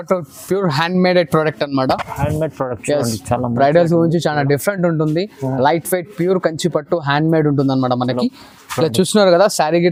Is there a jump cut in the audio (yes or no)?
no